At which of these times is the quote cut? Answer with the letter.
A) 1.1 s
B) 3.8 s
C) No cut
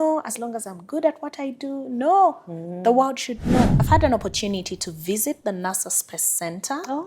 B